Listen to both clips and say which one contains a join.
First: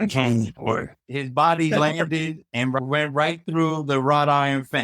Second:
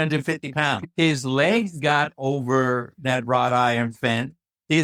first; 1 cut; at 1.0 s

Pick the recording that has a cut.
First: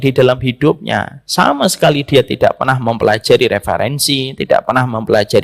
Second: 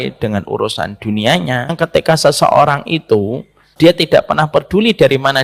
second; 2 cuts; at 1.7 s, 3.7 s

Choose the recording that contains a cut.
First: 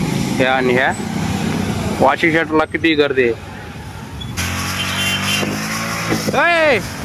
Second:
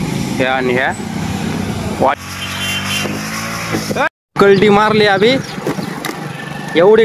second; 2 cuts; at 2.2 s, 4.1 s

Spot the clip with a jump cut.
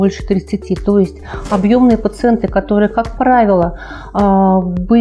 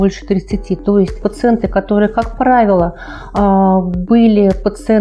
second; 1 cut; at 1.3 s

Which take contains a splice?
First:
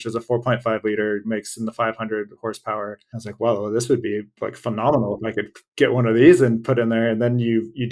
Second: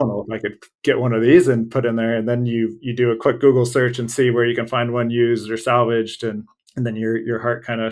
first; 2 cuts; at 1.2 s, 3.1 s

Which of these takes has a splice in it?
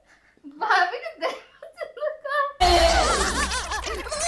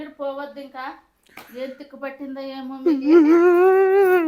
first; 1 cut; at 2.5 s

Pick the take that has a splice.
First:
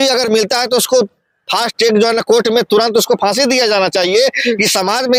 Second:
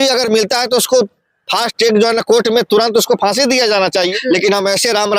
second; 1 cut; at 4.1 s

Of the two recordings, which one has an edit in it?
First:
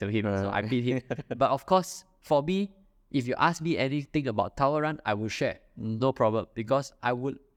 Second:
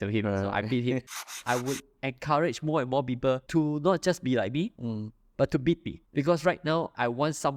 second; 3 cuts; at 1.3 s, 3.4 s, 6.0 s

